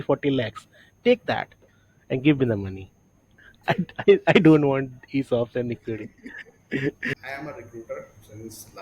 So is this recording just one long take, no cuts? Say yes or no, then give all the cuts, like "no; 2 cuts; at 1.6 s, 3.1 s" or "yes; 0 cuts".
no; 1 cut; at 7.2 s